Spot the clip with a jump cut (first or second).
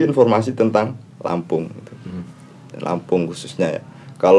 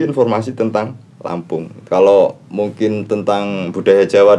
second